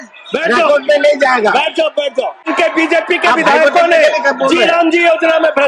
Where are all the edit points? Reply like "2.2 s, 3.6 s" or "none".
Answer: 2.5 s